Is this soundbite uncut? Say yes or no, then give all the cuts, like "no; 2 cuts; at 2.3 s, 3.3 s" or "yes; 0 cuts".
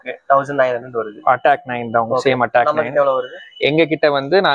yes; 0 cuts